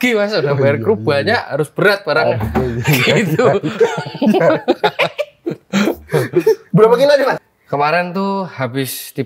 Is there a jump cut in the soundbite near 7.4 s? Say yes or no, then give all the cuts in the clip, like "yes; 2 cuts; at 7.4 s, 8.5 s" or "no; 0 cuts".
yes; 1 cut; at 7.4 s